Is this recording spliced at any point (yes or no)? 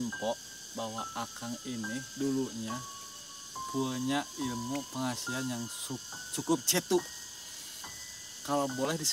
no